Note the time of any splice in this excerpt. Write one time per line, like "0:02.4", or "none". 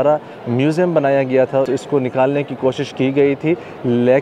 0:01.7